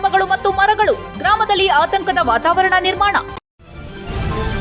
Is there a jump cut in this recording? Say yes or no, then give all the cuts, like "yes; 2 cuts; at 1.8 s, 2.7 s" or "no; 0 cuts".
yes; 1 cut; at 3.4 s